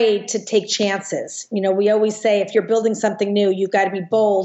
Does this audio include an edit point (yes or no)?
no